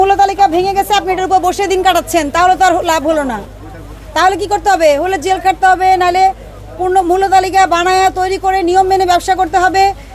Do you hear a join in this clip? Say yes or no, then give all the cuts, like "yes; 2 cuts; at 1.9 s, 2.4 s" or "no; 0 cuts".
no; 0 cuts